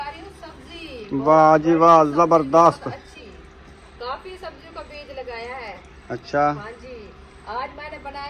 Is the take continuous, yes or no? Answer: no